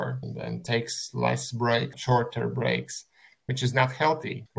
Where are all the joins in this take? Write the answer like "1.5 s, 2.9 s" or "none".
3.4 s